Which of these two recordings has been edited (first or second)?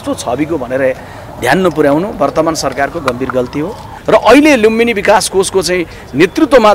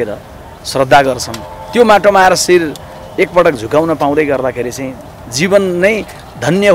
first